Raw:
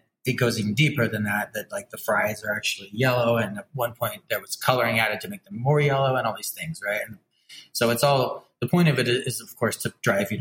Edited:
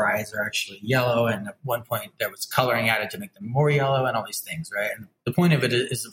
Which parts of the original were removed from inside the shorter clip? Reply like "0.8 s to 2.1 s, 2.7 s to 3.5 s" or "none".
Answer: 7.2 s to 8.5 s